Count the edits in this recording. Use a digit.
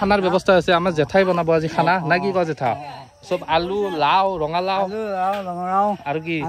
0